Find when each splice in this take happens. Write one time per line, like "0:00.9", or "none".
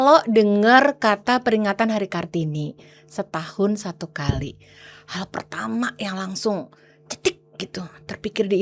none